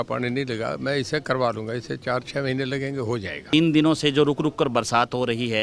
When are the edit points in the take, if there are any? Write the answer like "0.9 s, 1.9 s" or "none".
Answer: 3.5 s